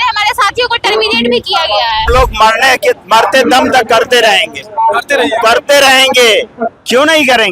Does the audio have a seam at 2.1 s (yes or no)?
yes